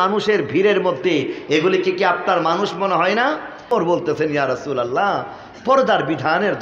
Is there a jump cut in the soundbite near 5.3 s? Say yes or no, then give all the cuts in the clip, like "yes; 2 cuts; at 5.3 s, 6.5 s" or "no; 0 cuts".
no; 1 cut; at 3.7 s